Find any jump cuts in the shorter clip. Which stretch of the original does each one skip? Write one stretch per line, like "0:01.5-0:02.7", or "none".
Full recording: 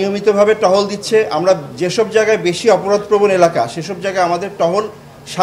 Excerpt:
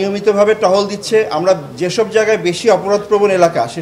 none